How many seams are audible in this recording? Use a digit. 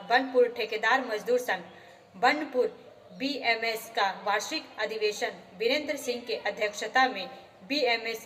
0